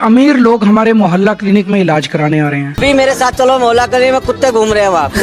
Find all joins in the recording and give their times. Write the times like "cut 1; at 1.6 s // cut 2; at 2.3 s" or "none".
cut 1; at 2.7 s